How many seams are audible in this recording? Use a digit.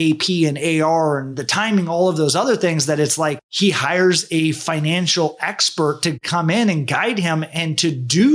1